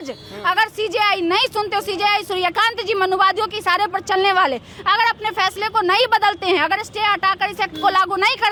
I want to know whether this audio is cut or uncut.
uncut